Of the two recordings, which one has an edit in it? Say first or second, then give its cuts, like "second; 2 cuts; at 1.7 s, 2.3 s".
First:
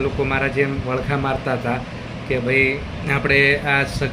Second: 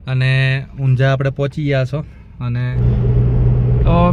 second; 1 cut; at 2.7 s